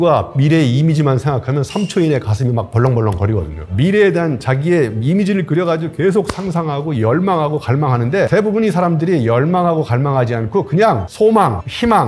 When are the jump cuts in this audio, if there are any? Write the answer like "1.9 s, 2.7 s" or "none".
3.6 s, 8.3 s